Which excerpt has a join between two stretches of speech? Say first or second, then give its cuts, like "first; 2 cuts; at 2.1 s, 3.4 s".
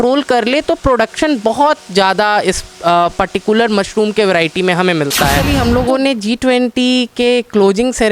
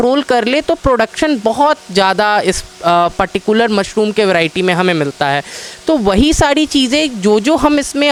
first; 1 cut; at 5.4 s